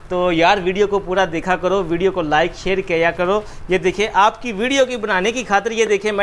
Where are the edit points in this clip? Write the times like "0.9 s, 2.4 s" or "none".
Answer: none